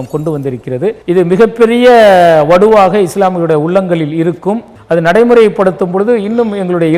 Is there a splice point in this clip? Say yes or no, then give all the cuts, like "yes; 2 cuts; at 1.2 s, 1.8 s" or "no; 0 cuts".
yes; 2 cuts; at 1.0 s, 4.7 s